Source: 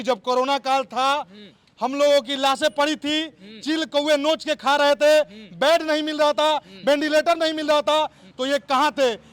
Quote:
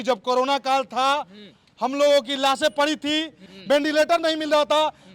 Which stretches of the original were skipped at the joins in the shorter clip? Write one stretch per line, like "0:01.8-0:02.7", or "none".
0:03.5-0:06.7